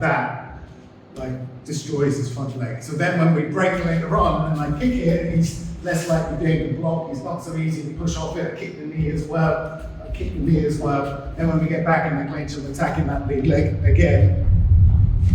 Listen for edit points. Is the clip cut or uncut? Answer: uncut